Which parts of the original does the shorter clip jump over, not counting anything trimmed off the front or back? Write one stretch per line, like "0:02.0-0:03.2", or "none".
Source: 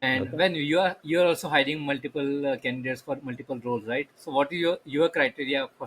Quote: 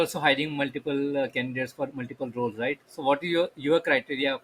none